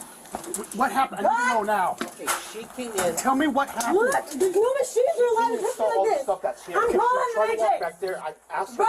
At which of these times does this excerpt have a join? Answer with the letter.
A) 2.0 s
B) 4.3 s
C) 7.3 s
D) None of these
B